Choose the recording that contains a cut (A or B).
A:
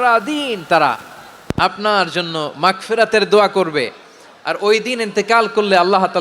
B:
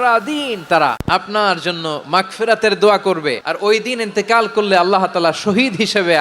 B